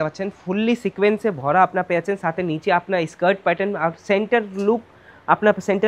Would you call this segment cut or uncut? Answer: uncut